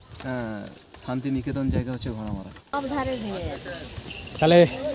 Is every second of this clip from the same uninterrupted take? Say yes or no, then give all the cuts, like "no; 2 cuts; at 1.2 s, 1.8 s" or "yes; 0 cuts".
no; 1 cut; at 2.7 s